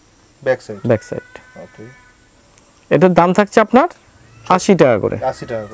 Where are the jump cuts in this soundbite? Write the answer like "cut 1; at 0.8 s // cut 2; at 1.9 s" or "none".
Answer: none

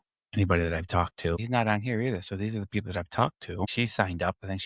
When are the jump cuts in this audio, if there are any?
cut 1; at 1.4 s // cut 2; at 3.7 s

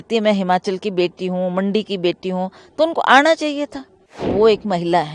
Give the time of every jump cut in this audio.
cut 1; at 4.1 s

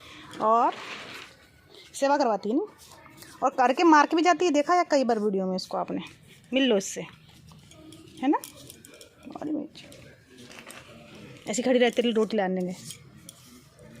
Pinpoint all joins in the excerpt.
none

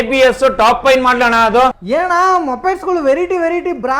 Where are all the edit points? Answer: cut 1; at 1.8 s

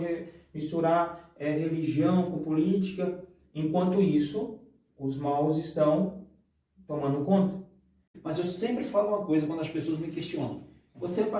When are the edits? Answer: cut 1; at 8.1 s

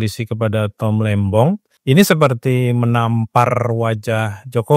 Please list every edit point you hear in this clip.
cut 1; at 1.7 s

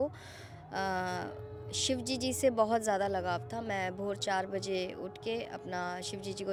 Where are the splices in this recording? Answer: none

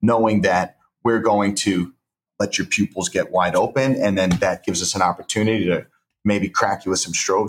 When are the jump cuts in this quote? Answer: cut 1; at 2.2 s

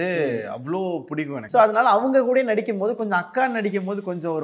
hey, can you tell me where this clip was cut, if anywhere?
cut 1; at 1.4 s

